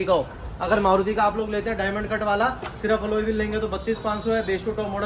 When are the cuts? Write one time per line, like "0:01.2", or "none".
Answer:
none